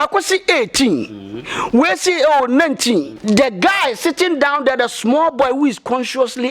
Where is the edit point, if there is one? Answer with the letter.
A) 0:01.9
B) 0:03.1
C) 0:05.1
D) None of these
B